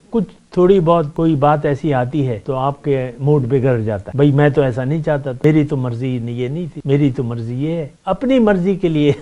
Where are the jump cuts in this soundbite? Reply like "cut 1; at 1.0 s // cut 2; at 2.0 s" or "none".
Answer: cut 1; at 1.1 s // cut 2; at 2.4 s // cut 3; at 4.0 s // cut 4; at 5.3 s // cut 5; at 6.7 s // cut 6; at 7.9 s